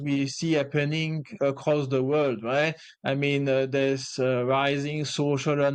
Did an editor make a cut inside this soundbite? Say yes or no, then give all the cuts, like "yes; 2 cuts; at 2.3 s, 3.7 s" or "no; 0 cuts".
no; 0 cuts